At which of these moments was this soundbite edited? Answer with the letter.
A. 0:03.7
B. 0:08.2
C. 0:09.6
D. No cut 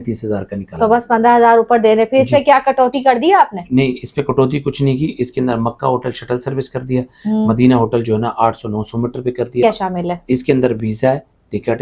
C